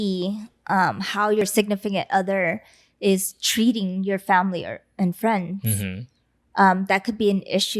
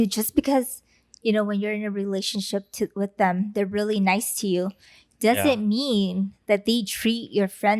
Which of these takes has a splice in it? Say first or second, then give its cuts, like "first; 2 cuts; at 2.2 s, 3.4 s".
first; 1 cut; at 1.4 s